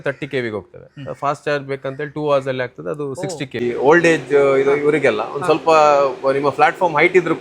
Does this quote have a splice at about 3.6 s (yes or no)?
yes